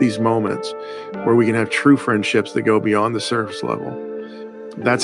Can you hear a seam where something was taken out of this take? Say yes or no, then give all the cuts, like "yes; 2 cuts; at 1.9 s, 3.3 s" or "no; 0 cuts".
no; 0 cuts